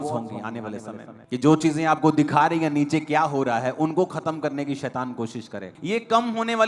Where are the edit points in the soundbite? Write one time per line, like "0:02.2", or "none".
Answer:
0:05.7